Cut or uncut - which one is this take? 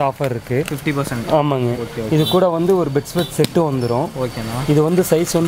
uncut